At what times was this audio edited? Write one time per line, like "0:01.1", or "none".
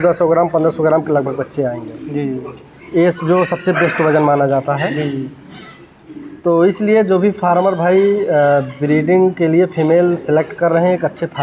none